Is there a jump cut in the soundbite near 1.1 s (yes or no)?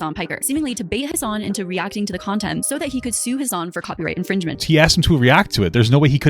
yes